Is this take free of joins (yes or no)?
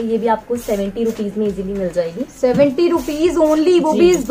yes